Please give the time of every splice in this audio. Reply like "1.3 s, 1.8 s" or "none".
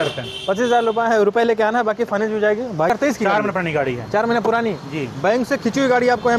2.9 s